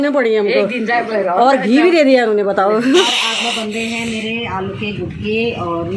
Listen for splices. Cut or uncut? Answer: cut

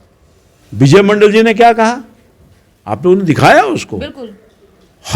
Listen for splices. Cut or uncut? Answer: uncut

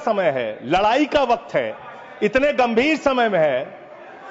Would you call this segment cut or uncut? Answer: uncut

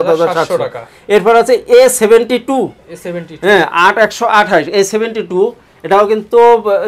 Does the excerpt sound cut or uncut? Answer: uncut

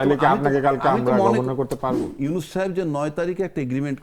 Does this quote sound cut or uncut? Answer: cut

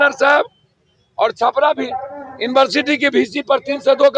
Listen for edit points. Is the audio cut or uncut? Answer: uncut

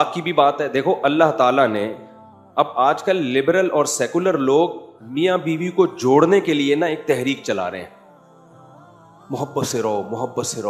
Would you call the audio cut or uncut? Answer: uncut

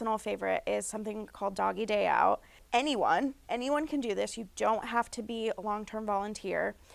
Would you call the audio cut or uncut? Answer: cut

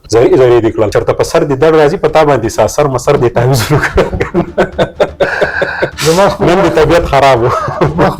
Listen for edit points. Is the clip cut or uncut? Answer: cut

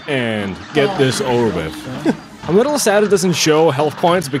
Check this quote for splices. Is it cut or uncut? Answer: cut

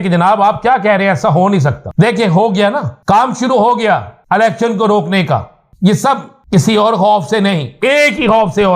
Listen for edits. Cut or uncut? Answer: cut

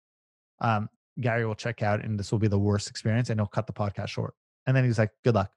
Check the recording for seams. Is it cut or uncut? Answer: cut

